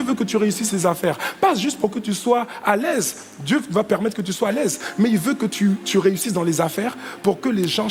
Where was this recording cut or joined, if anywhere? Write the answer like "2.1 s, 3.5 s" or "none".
none